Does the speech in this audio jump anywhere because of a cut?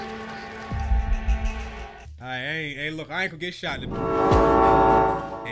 yes; 1 cut; at 4.1 s

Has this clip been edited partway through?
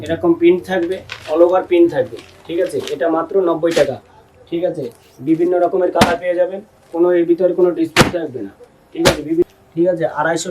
yes; 1 cut; at 9.4 s

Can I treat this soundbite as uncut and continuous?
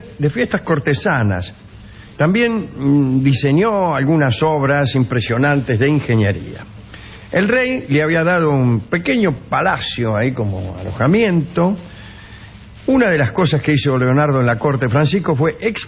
yes; 0 cuts

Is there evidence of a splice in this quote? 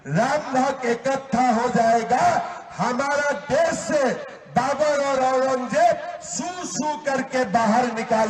no; 0 cuts

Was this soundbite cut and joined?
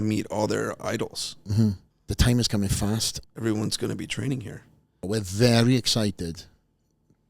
yes; 3 cuts; at 1.9 s, 3.2 s, 5.0 s

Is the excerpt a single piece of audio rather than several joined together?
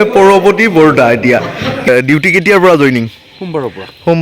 no; 1 cut; at 1.9 s

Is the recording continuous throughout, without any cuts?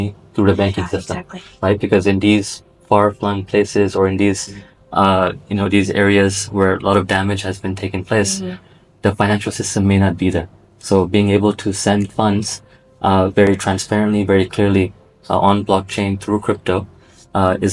yes; 0 cuts

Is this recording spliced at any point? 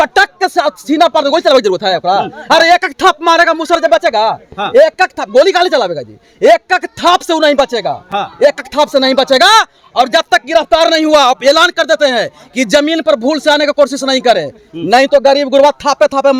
no; 0 cuts

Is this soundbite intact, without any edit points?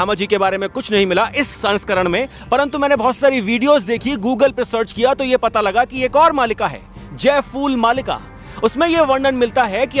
yes; 0 cuts

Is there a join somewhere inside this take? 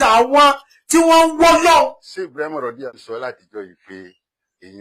yes; 1 cut; at 2.9 s

